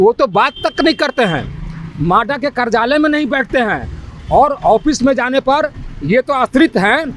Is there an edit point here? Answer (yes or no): no